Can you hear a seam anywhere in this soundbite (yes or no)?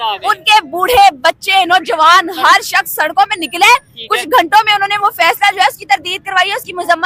no